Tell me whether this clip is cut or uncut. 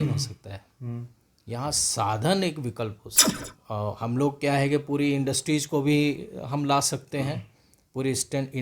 cut